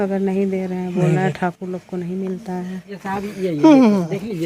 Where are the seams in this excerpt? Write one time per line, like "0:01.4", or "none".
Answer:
0:02.9